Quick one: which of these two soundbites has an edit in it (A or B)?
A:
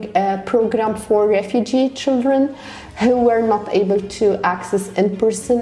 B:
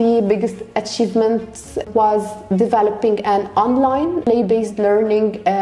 B